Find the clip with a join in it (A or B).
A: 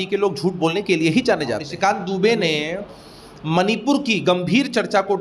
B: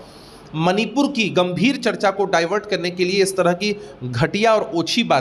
A